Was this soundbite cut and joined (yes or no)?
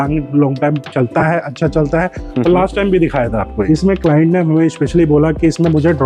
yes